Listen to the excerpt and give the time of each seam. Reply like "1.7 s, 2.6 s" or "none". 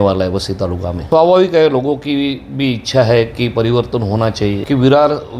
0.9 s, 4.6 s